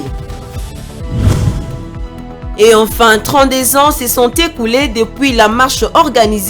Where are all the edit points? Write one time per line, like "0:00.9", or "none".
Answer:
0:02.5